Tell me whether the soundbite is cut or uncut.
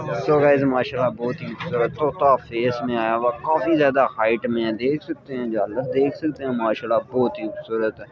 uncut